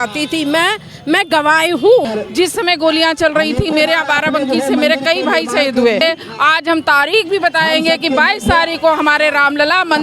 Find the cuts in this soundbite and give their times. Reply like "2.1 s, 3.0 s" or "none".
2.1 s, 6.0 s

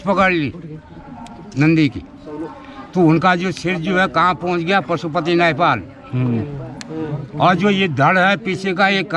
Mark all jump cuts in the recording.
none

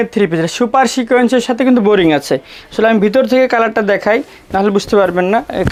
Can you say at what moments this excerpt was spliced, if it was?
none

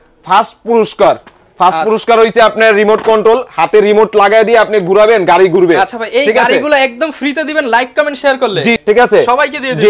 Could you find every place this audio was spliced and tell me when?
8.7 s

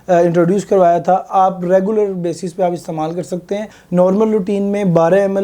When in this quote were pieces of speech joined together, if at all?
1.2 s, 3.8 s

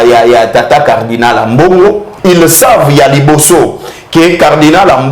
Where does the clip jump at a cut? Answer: 2.1 s

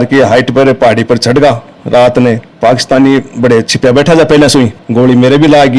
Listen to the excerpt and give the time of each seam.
2.5 s, 4.7 s

